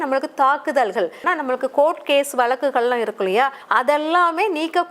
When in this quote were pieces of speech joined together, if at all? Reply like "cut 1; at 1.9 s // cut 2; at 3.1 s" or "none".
cut 1; at 1.2 s // cut 2; at 3.6 s